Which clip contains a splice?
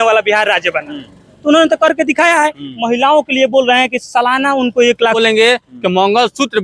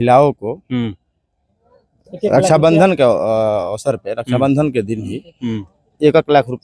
first; 1 cut; at 5.2 s

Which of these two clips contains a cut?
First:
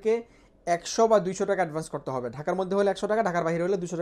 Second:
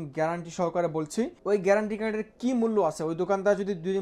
second; 1 cut; at 1.4 s

